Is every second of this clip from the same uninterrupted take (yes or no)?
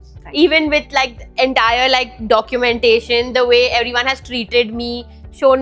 yes